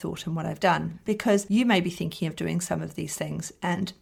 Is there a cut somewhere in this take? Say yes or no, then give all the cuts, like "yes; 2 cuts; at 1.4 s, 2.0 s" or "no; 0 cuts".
no; 0 cuts